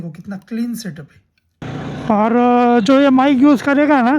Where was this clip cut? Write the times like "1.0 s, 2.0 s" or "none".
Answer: 1.6 s